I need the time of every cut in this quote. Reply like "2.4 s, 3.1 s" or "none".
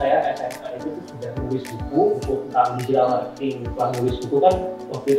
none